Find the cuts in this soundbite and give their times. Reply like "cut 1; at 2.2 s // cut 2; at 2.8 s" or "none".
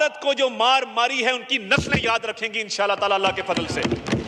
none